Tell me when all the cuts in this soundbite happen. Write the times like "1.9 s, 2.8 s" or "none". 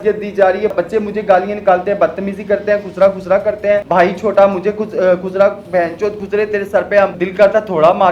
0.7 s, 3.8 s, 7.2 s